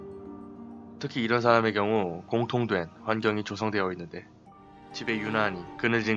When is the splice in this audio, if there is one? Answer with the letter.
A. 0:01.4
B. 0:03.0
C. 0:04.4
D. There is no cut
A